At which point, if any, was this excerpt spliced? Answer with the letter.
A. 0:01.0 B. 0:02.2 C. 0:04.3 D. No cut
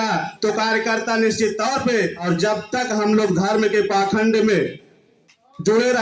B